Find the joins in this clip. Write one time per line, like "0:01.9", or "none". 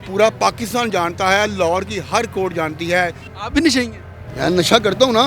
0:03.3

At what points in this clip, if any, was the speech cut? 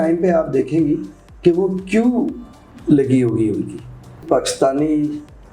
0:04.2

